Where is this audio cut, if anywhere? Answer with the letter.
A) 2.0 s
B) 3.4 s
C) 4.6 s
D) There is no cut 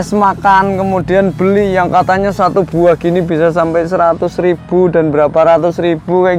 D